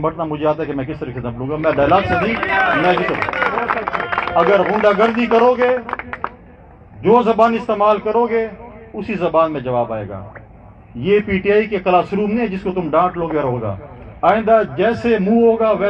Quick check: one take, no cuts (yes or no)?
yes